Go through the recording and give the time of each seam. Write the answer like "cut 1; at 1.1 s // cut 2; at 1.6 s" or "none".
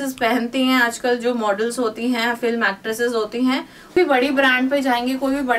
cut 1; at 3.9 s